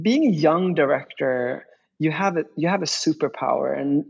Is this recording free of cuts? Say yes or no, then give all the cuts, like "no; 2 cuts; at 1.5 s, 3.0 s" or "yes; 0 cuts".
yes; 0 cuts